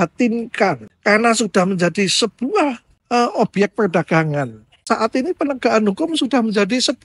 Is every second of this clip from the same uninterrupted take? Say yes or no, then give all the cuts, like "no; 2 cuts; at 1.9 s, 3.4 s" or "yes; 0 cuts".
no; 1 cut; at 4.9 s